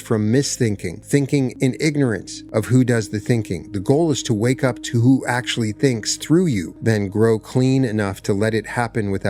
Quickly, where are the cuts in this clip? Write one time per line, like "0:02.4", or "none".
0:01.0
0:01.5
0:02.3
0:06.7